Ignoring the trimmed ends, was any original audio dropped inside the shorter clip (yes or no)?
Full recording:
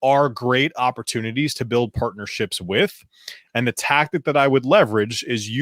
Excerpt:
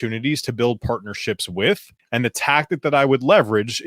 yes